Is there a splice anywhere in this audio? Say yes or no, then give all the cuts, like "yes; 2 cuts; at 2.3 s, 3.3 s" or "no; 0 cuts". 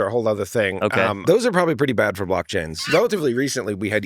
yes; 2 cuts; at 1.2 s, 2.8 s